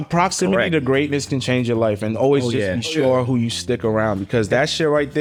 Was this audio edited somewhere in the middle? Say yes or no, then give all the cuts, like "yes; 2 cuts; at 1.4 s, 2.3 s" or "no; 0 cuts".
no; 0 cuts